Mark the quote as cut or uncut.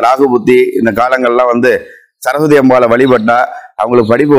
uncut